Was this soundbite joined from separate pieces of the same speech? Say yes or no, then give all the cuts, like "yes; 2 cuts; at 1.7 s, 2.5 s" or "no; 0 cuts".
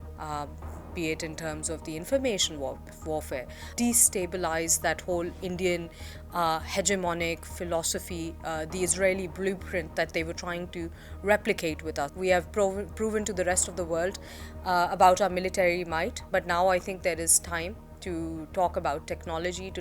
yes; 2 cuts; at 3.6 s, 12.1 s